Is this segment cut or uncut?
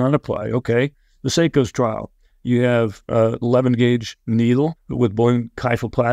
cut